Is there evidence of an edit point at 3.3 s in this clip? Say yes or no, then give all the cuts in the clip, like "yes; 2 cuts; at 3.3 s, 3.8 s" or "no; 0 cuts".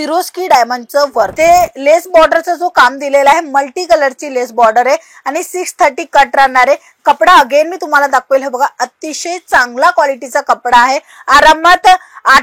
no; 1 cut; at 1.3 s